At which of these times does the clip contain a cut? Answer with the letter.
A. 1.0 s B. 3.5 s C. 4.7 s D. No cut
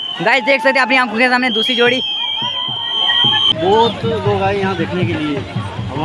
B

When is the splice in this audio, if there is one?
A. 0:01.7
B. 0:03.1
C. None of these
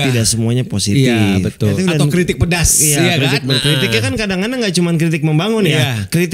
A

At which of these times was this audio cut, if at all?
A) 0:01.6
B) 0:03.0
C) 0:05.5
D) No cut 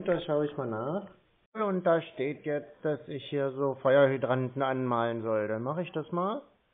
A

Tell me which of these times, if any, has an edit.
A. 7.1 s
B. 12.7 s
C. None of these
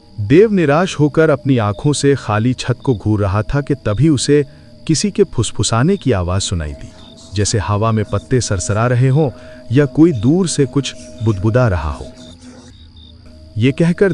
B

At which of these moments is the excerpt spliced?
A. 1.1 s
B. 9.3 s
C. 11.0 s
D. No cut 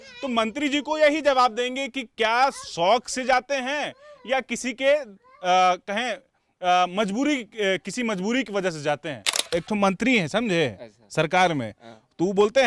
B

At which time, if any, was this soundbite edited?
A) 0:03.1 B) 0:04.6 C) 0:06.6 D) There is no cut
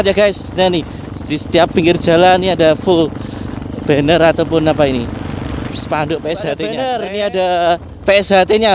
C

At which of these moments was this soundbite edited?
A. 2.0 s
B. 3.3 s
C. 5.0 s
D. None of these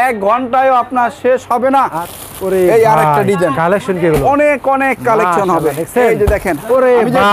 A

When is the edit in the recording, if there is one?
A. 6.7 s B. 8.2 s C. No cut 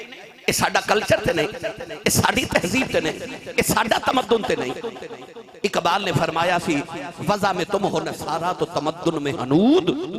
C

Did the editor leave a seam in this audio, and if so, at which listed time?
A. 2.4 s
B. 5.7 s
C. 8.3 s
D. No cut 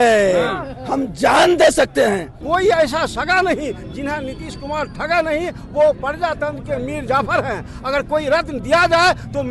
A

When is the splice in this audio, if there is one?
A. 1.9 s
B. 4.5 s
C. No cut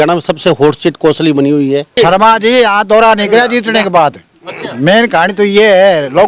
A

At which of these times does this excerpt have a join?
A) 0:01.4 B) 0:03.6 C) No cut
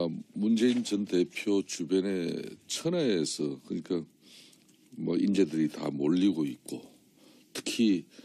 A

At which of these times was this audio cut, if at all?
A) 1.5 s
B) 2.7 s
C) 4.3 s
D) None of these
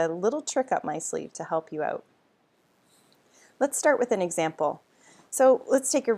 C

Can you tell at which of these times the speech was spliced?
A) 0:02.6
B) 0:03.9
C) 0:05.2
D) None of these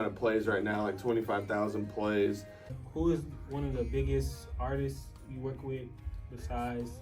A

